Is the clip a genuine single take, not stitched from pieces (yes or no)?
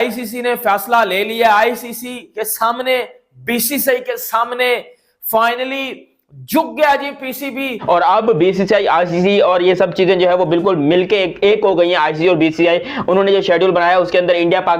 no